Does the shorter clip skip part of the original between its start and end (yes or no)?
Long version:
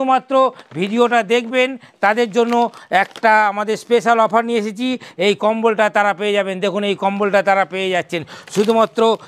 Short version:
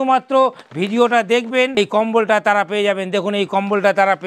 yes